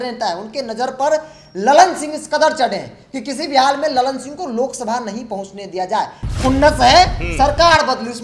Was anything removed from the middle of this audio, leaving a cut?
no; 0 cuts

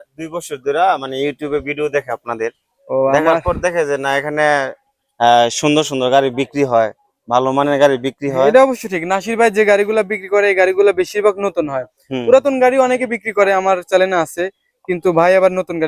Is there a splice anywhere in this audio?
no; 0 cuts

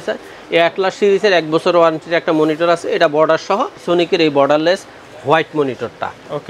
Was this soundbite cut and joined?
yes; 1 cut; at 3.8 s

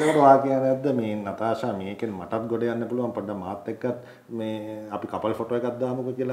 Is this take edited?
no; 0 cuts

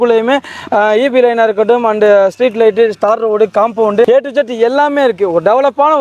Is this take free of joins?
yes; 0 cuts

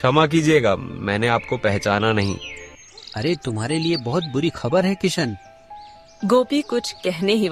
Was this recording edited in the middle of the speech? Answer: no; 0 cuts

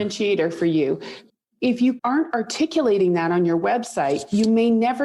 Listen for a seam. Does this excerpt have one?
yes; 2 cuts; at 1.2 s, 2.0 s

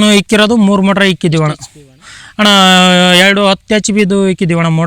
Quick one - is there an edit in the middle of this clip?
no; 0 cuts

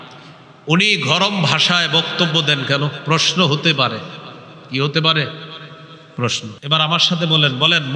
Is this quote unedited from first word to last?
no; 1 cut; at 6.6 s

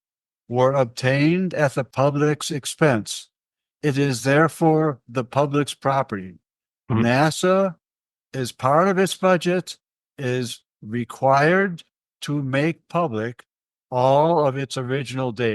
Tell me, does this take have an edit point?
yes; 1 cut; at 1.8 s

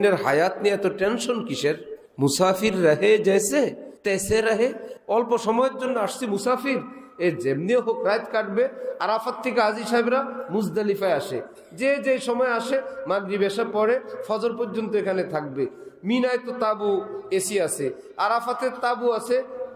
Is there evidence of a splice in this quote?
yes; 2 cuts; at 3.9 s, 4.9 s

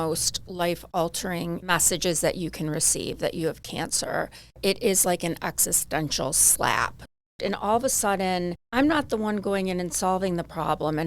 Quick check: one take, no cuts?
no; 4 cuts; at 1.6 s, 4.6 s, 7.2 s, 8.6 s

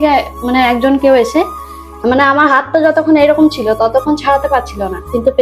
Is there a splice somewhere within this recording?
no; 0 cuts

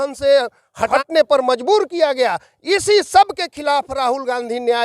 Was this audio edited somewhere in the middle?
yes; 1 cut; at 0.9 s

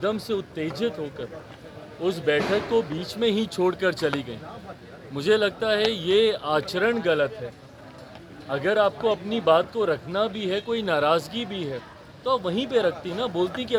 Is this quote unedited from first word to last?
yes; 0 cuts

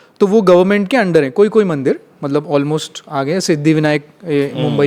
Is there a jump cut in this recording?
no; 0 cuts

